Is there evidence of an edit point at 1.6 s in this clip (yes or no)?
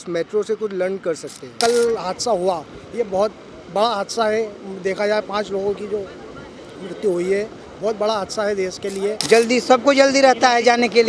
yes